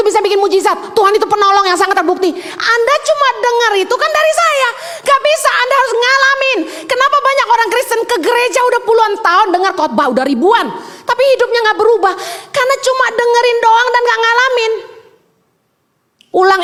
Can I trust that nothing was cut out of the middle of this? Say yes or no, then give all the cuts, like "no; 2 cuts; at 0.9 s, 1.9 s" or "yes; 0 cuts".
yes; 0 cuts